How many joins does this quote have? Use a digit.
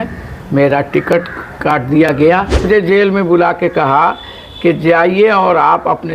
1